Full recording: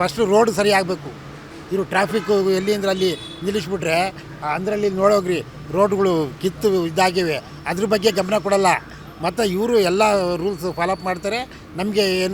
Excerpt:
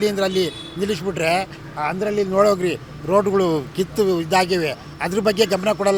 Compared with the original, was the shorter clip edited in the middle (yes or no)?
no